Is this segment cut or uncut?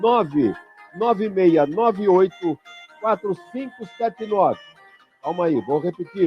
cut